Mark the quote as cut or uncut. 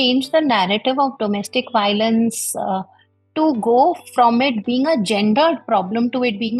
uncut